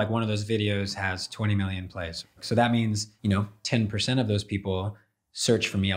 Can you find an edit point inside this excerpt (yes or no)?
yes